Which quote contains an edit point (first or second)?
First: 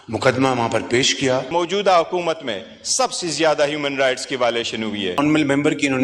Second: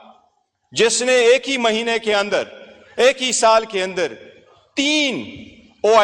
first